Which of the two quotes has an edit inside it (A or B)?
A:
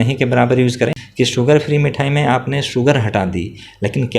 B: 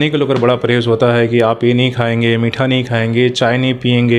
A